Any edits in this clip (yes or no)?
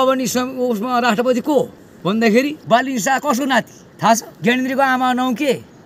yes